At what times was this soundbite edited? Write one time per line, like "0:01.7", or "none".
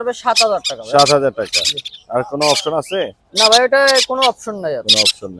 none